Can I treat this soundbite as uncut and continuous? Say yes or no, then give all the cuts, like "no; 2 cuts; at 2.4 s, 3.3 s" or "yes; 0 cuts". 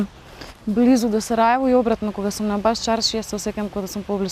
yes; 0 cuts